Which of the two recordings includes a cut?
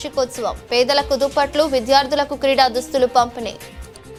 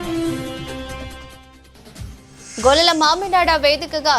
second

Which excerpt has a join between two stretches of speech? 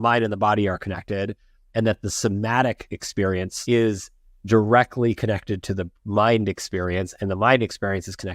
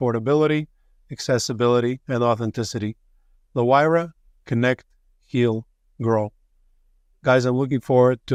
first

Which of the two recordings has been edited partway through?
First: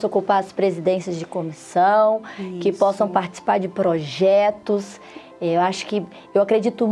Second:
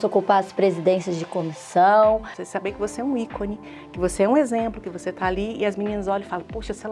second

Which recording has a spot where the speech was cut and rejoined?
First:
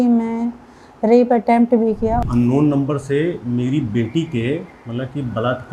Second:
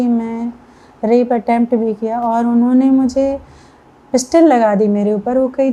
first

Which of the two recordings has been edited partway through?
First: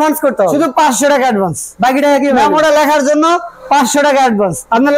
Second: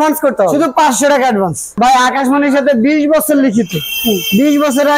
second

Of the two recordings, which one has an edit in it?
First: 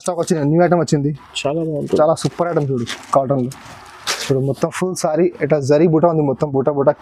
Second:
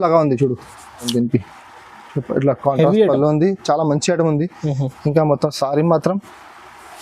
second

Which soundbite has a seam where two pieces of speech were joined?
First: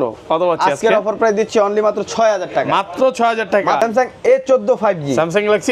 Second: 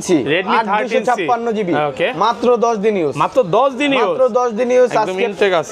first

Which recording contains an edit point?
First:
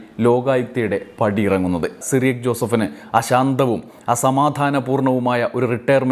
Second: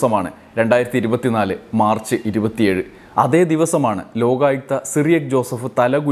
first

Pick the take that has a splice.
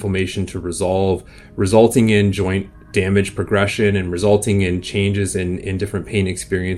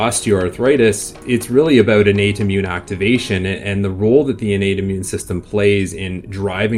second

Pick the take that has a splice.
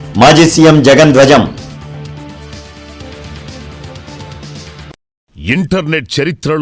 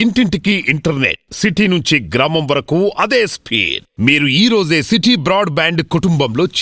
first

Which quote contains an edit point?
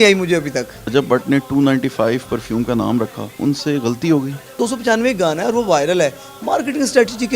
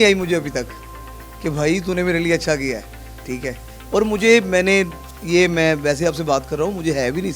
first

